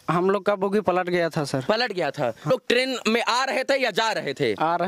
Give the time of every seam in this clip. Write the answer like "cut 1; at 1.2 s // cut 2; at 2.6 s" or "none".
cut 1; at 2.5 s

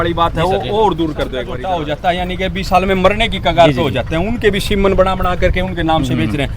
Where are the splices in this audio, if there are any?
cut 1; at 1.5 s

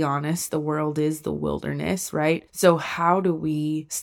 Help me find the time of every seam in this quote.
none

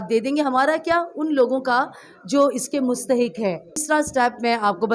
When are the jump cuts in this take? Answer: cut 1; at 3.8 s

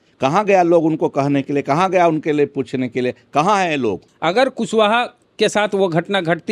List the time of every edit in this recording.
cut 1; at 4.1 s // cut 2; at 5.2 s

